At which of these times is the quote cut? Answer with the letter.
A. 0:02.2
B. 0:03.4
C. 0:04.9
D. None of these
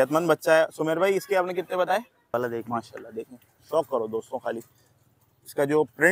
A